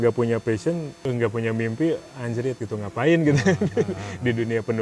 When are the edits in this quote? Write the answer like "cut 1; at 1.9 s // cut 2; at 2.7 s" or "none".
cut 1; at 1.0 s